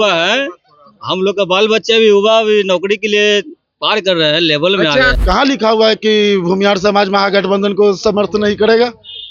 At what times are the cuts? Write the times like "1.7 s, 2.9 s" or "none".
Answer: 5.2 s